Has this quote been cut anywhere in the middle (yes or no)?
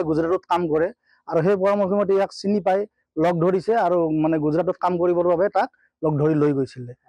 no